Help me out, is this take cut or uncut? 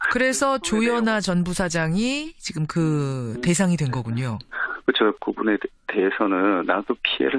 cut